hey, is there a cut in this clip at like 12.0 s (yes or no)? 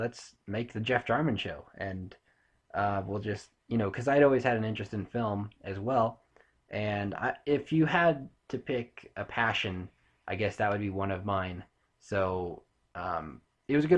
no